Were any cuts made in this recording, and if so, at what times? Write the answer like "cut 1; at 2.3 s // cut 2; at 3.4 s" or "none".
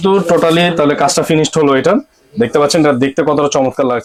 none